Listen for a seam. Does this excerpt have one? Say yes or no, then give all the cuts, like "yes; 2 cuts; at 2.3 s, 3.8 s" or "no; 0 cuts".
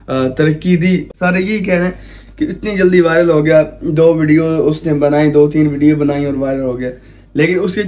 yes; 1 cut; at 1.1 s